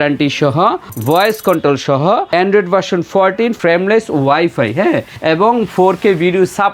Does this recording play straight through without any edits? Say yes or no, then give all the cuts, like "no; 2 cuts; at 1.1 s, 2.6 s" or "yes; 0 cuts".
no; 4 cuts; at 0.9 s, 2.3 s, 3.6 s, 5.1 s